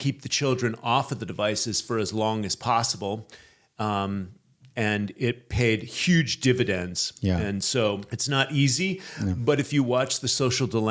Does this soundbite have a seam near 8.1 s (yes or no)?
yes